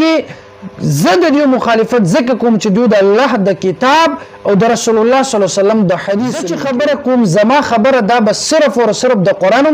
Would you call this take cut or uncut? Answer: cut